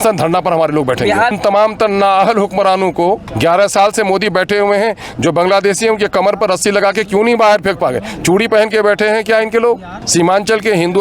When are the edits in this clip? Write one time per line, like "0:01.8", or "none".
0:01.4
0:03.3
0:10.0